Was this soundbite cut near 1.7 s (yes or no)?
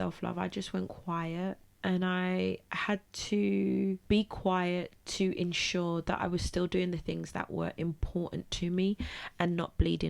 yes